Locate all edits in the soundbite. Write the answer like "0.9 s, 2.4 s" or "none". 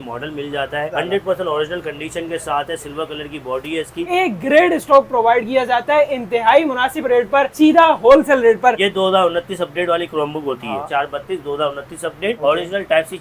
0.9 s, 4.1 s, 8.8 s, 10.9 s, 12.4 s